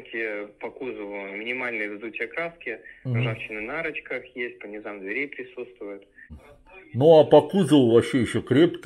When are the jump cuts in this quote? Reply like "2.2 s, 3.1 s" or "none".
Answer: 6.5 s